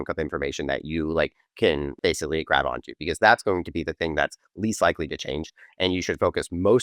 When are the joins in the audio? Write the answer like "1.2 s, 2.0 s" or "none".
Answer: 2.0 s